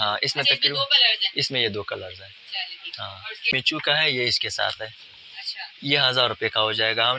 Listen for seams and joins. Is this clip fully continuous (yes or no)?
no